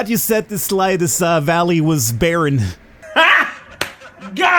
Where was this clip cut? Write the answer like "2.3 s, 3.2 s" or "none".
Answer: none